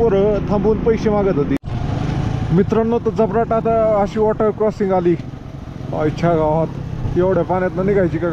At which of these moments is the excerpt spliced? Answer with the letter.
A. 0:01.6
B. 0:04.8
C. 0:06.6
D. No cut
A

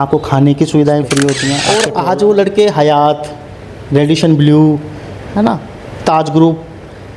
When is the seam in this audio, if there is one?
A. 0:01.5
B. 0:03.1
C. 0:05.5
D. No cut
A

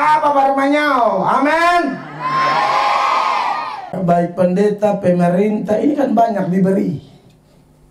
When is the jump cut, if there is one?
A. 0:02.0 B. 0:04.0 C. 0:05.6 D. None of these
B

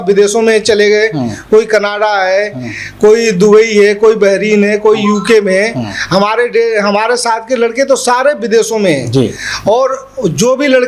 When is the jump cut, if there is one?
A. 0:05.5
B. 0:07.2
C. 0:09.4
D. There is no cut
D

